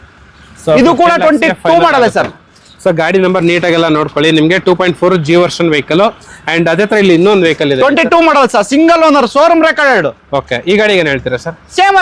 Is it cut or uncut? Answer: uncut